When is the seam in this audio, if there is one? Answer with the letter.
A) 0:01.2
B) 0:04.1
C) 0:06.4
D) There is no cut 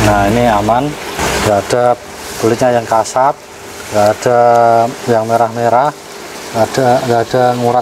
A